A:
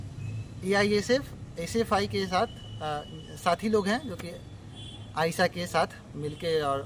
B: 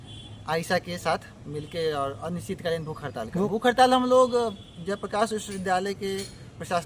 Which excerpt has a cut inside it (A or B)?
B